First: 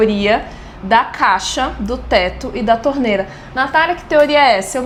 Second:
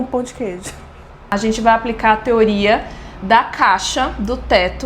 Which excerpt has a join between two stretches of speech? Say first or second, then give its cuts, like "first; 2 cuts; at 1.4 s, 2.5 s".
second; 1 cut; at 1.3 s